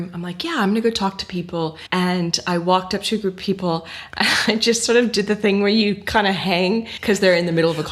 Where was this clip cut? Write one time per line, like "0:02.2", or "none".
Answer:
0:01.8
0:06.9